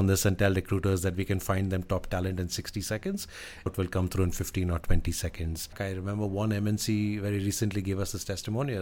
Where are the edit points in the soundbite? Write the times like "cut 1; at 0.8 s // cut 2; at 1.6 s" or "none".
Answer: cut 1; at 3.7 s // cut 2; at 5.8 s